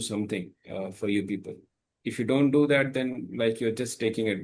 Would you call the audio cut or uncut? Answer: uncut